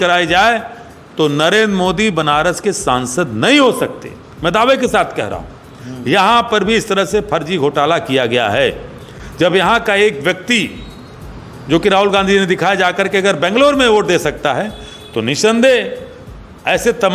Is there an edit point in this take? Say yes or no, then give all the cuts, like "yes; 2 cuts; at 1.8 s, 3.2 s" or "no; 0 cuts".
no; 0 cuts